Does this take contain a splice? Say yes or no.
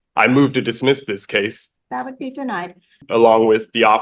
yes